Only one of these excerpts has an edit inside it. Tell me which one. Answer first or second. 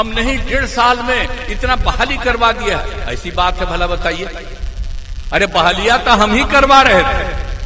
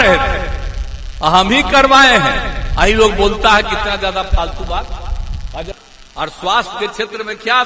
second